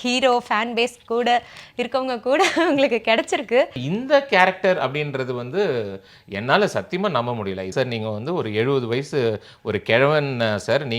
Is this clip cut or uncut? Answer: cut